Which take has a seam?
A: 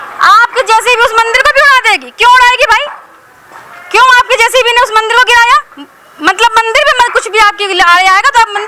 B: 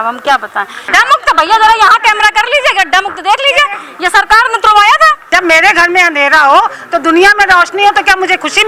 B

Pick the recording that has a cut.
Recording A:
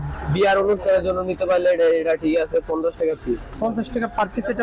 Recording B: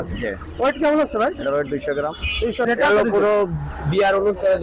B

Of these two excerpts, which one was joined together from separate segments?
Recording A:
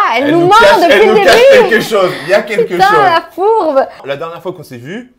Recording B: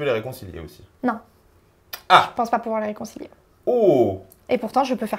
A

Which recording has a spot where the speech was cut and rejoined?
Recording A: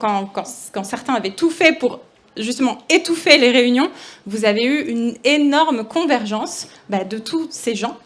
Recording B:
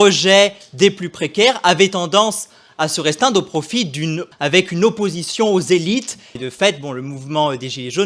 B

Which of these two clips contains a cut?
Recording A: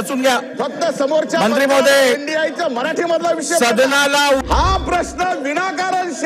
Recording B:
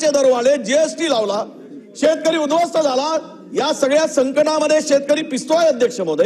A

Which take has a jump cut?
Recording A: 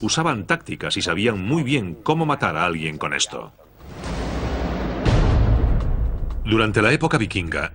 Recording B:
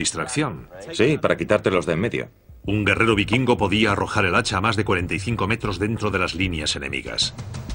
A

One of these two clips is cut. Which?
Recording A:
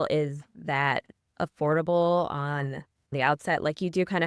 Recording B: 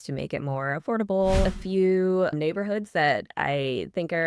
B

